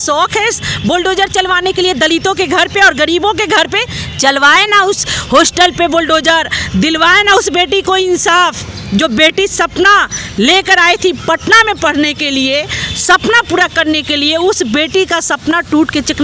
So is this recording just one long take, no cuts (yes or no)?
yes